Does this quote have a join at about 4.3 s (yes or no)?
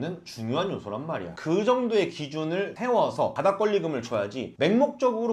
no